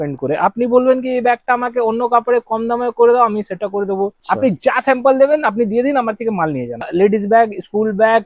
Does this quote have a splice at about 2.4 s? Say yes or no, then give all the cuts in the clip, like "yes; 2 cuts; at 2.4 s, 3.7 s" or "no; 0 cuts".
no; 2 cuts; at 4.2 s, 6.9 s